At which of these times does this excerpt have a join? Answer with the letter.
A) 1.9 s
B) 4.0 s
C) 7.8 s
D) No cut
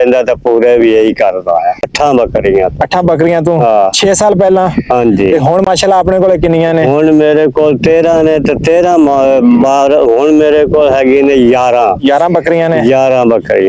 A